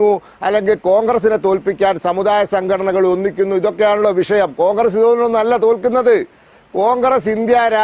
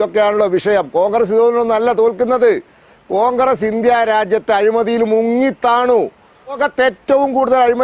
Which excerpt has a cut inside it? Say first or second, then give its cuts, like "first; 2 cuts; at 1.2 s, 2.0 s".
second; 1 cut; at 6.6 s